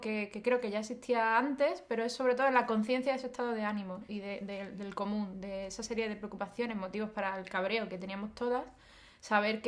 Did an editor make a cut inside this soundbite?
yes; 1 cut; at 5.6 s

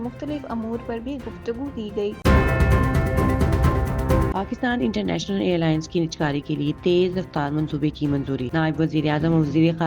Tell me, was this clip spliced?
yes; 2 cuts; at 2.2 s, 4.3 s

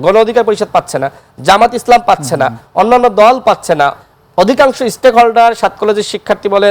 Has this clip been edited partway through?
no; 0 cuts

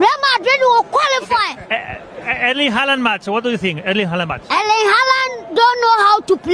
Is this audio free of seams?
yes; 0 cuts

